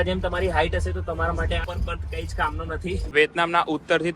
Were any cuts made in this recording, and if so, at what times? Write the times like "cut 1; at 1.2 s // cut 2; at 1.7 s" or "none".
cut 1; at 3.1 s